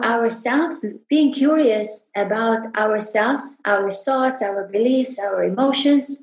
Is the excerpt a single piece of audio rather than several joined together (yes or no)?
yes